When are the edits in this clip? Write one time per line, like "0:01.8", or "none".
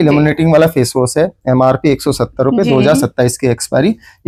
none